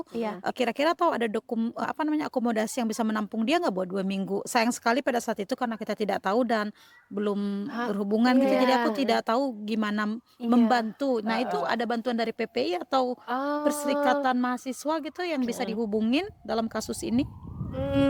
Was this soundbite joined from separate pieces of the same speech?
no; 0 cuts

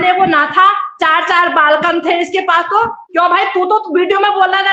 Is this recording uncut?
yes; 0 cuts

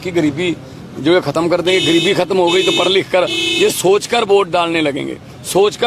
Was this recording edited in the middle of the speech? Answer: no; 0 cuts

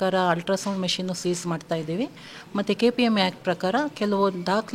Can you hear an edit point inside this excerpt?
no; 0 cuts

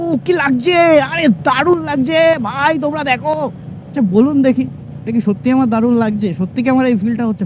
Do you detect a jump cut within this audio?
no; 0 cuts

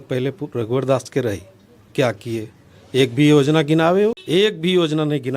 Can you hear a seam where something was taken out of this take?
yes; 1 cut; at 4.2 s

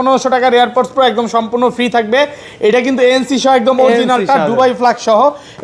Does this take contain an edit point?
no; 0 cuts

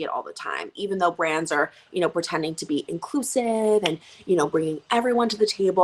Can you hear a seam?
no; 0 cuts

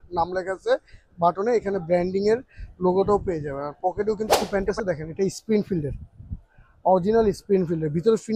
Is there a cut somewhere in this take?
yes; 1 cut; at 4.4 s

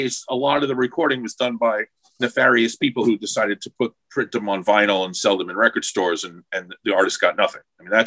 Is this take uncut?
yes; 0 cuts

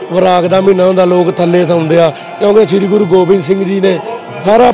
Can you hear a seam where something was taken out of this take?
no; 0 cuts

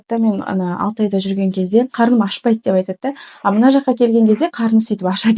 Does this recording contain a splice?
yes; 1 cut; at 1.9 s

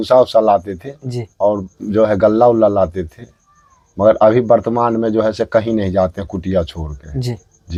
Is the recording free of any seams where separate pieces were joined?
yes; 0 cuts

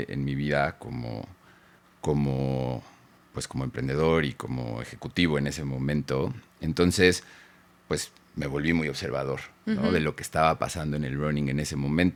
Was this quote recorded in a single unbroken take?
yes; 0 cuts

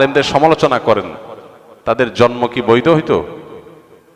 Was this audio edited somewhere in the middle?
no; 0 cuts

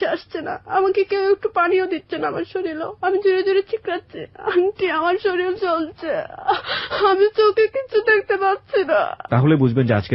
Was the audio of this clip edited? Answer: yes; 1 cut; at 9.2 s

